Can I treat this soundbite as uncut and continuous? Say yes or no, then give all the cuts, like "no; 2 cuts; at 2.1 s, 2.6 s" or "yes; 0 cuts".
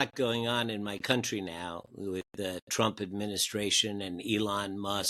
yes; 0 cuts